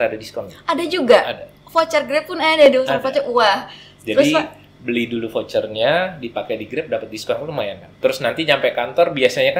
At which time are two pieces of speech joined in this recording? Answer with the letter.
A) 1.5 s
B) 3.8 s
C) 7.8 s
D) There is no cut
C